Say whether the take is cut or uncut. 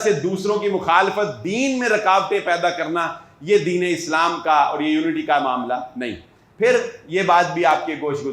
uncut